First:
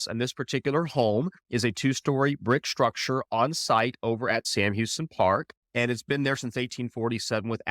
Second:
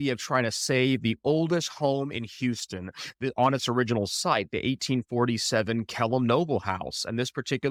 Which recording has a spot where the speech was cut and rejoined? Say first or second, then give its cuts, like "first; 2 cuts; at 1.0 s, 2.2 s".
first; 1 cut; at 4.4 s